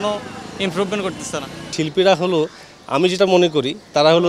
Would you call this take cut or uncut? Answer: uncut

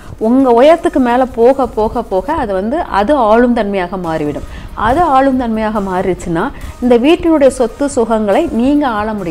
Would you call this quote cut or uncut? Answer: uncut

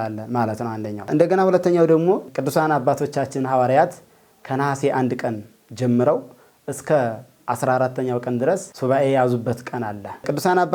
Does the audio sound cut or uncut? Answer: uncut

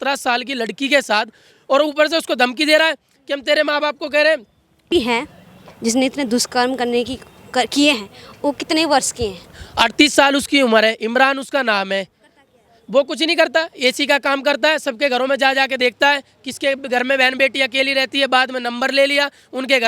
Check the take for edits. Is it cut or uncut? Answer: cut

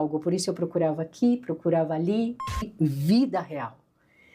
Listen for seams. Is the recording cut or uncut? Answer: cut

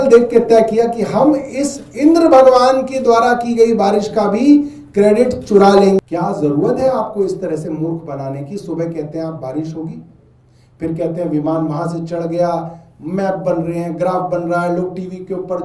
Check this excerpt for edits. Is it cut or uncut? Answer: cut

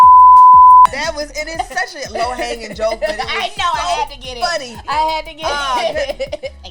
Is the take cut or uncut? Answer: cut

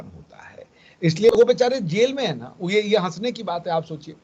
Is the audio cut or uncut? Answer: cut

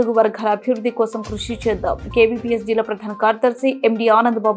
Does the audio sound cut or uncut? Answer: uncut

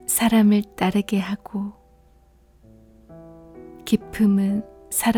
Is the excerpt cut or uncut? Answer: uncut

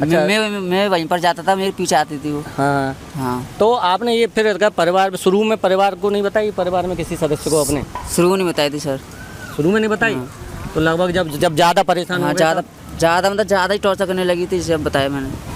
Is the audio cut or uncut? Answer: uncut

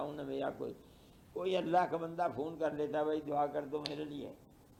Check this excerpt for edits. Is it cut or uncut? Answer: uncut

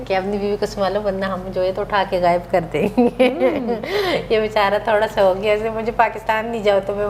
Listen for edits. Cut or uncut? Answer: uncut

